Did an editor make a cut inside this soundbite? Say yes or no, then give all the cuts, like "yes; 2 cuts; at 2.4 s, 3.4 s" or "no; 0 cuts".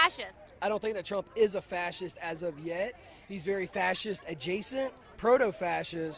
yes; 1 cut; at 2.0 s